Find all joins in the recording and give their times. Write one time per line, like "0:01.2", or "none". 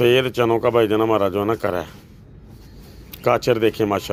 none